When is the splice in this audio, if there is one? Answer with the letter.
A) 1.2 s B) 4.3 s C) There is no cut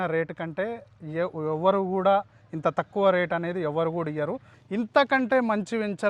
B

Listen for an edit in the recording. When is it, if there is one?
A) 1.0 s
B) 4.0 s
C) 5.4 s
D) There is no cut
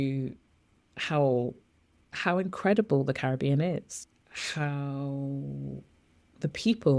B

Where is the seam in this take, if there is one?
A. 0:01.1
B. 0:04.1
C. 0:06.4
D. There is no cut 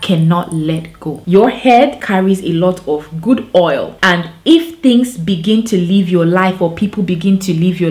A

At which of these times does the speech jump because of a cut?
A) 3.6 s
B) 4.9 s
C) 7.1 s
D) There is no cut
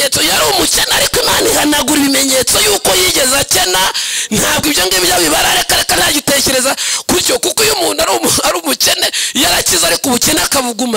D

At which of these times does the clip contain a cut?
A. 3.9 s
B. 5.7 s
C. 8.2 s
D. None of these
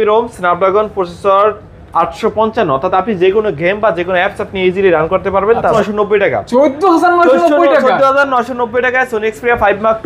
B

